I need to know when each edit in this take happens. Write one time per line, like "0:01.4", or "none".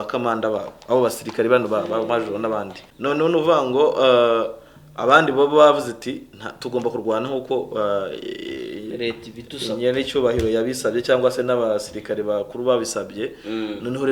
0:02.8